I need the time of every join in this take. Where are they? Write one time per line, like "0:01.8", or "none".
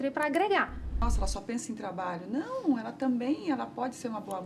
0:01.0